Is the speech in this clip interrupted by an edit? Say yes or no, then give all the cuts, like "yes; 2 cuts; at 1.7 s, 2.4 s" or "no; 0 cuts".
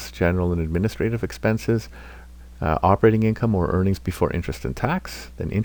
no; 0 cuts